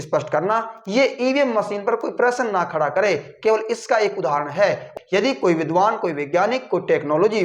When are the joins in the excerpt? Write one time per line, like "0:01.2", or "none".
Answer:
0:04.9